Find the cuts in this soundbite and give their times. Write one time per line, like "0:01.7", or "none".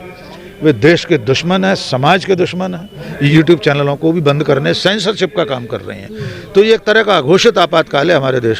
0:03.1